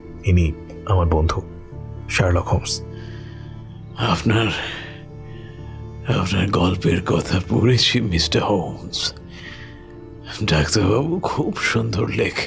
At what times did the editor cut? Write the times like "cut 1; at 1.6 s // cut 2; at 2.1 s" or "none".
none

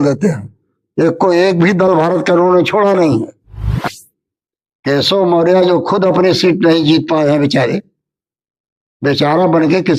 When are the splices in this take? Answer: cut 1; at 3.8 s

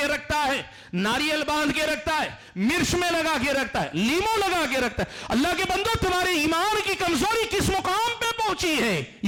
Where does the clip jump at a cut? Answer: none

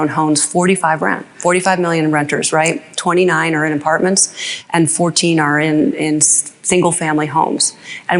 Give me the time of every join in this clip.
none

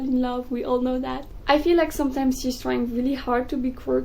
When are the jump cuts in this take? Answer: cut 1; at 1.3 s

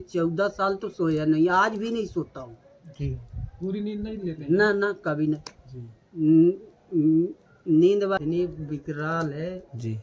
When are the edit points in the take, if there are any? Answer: cut 1; at 8.2 s

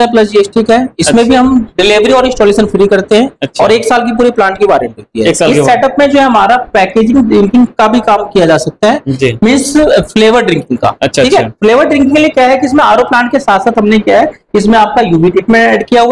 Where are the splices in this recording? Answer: none

